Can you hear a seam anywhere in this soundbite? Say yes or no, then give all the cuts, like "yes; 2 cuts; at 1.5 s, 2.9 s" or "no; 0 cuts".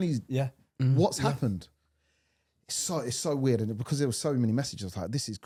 no; 0 cuts